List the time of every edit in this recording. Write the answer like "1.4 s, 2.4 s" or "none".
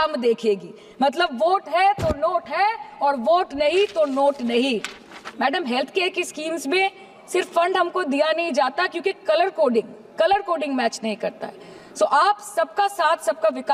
none